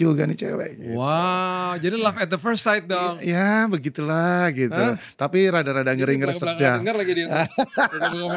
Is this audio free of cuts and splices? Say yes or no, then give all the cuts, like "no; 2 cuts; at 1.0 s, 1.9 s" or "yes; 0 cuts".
yes; 0 cuts